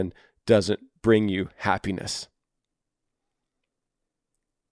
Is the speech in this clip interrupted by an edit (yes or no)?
no